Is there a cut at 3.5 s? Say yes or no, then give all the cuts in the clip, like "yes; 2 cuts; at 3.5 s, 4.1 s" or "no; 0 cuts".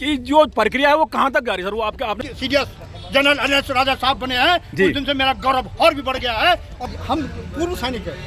no; 2 cuts; at 2.2 s, 6.8 s